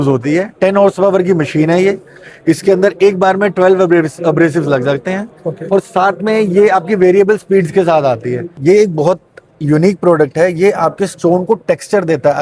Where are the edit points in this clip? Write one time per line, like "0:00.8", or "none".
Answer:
0:08.5